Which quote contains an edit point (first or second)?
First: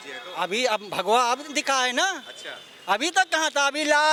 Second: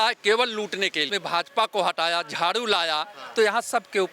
second